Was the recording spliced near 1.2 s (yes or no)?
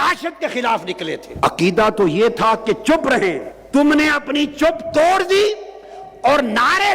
yes